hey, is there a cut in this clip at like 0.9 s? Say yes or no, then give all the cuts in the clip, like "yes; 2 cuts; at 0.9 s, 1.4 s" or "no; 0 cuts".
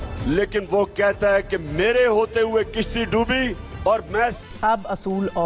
no; 1 cut; at 4.4 s